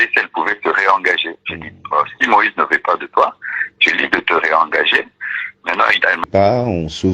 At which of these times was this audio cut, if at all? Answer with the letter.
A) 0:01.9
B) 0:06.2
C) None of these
B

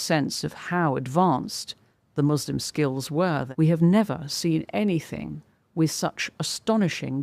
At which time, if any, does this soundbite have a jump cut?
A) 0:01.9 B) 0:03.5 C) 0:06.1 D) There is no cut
B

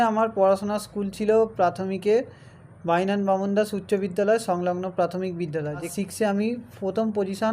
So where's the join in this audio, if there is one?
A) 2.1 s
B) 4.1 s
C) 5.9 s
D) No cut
C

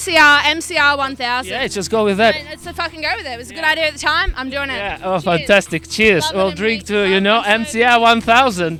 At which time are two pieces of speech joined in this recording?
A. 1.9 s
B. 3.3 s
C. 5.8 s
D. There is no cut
D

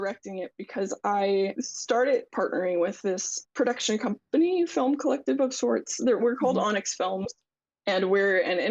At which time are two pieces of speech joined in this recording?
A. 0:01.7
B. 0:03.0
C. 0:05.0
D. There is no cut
A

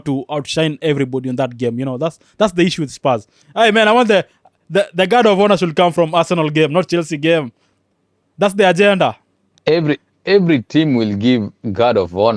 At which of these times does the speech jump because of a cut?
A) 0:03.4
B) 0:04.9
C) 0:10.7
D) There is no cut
A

